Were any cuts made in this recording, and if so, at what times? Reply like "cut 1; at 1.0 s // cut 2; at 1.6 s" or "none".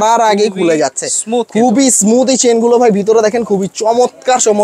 none